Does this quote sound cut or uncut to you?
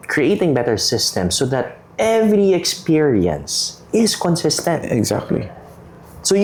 uncut